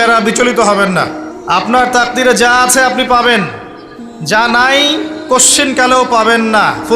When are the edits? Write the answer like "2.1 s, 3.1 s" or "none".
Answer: 1.3 s